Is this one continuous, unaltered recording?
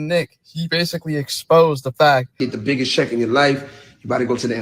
no; 1 cut; at 2.5 s

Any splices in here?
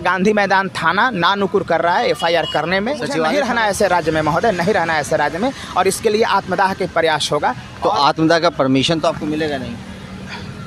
yes; 1 cut; at 3.2 s

